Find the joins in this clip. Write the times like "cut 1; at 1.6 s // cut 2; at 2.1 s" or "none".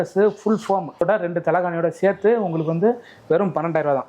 cut 1; at 1.0 s